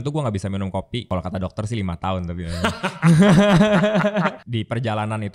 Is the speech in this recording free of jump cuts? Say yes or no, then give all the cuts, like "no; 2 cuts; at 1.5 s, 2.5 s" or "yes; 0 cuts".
no; 2 cuts; at 1.0 s, 4.4 s